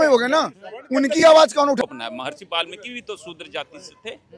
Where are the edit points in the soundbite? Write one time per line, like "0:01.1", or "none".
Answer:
0:01.8